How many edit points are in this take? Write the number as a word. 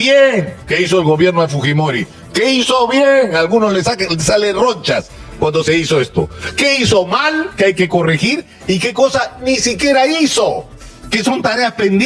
zero